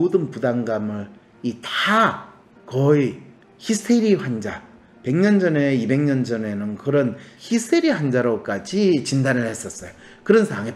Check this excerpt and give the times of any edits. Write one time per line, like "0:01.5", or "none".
0:07.3